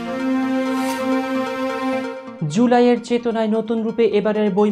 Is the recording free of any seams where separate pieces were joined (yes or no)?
no